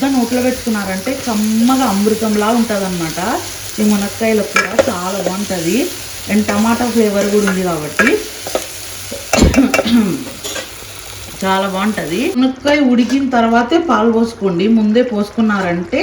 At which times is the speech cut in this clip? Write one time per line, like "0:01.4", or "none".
0:12.4